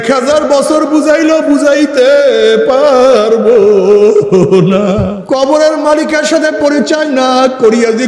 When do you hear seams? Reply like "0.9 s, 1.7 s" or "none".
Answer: 5.1 s